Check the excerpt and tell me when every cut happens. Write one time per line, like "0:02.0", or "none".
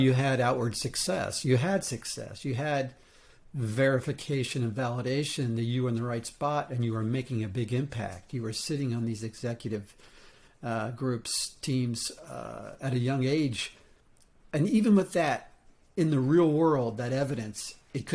none